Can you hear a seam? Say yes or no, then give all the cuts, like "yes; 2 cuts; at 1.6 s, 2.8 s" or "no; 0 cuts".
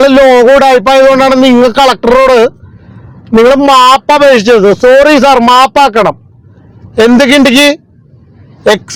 no; 0 cuts